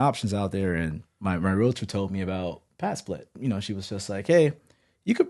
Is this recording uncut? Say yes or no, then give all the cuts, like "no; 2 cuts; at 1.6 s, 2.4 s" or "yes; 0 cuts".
no; 1 cut; at 3.4 s